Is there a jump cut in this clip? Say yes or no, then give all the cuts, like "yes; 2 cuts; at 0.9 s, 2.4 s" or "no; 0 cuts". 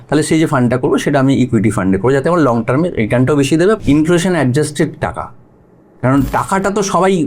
yes; 1 cut; at 3.8 s